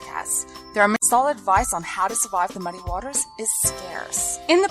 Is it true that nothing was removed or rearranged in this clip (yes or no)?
no